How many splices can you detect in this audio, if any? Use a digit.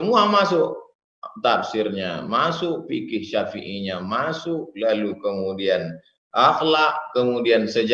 0